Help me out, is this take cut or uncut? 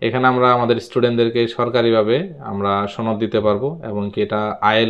uncut